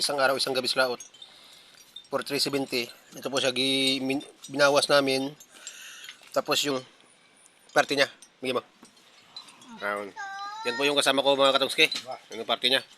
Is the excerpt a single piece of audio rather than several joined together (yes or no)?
no